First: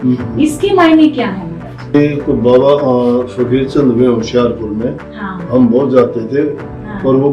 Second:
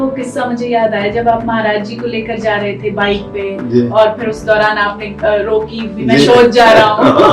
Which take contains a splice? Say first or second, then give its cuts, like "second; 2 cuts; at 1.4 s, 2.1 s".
first; 1 cut; at 1.9 s